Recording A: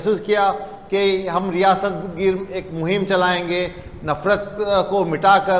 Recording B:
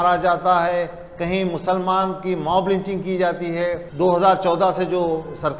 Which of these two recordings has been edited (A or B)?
B